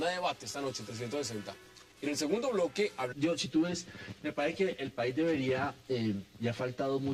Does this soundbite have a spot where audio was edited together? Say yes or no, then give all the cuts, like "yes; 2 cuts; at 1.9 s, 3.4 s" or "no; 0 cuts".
no; 0 cuts